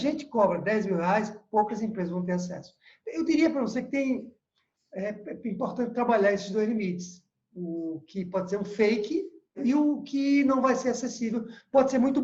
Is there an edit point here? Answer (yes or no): yes